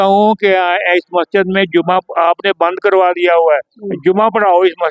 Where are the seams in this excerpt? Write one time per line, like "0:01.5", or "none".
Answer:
none